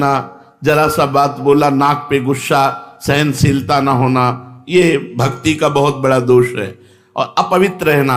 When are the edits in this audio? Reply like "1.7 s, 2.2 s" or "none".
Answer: none